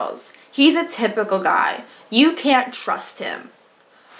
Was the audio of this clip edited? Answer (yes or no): no